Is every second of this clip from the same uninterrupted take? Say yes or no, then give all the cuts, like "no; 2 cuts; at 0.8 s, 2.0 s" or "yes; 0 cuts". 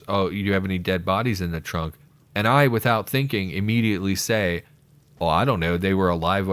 yes; 0 cuts